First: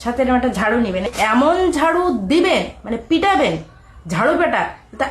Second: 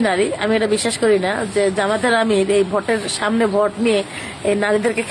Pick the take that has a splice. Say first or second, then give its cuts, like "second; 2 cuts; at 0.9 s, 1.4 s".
first; 1 cut; at 1.1 s